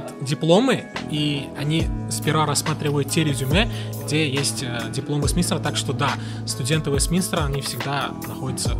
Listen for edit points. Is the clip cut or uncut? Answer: uncut